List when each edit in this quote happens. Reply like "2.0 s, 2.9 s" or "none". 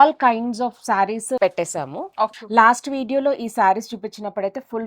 1.4 s, 2.3 s